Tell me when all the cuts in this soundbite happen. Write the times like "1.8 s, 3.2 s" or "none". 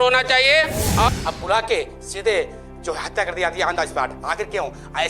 1.1 s